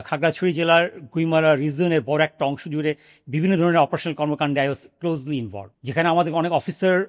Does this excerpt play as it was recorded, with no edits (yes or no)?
yes